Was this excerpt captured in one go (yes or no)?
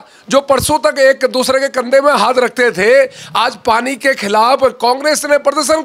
yes